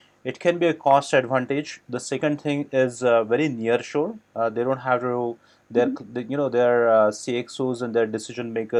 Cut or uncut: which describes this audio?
uncut